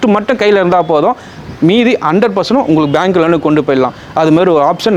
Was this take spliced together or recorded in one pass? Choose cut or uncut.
uncut